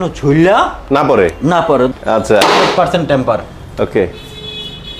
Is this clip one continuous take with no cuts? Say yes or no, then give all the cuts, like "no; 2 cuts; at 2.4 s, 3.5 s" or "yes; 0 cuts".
no; 1 cut; at 1.9 s